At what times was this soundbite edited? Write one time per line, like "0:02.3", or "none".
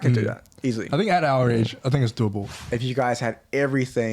0:02.5